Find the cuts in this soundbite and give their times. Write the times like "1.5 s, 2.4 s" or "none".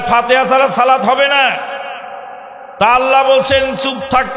none